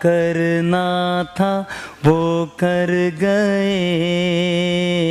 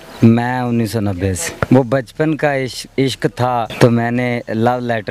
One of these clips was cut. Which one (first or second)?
second